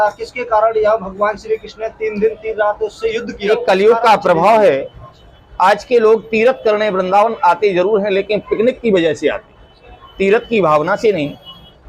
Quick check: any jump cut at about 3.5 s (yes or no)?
yes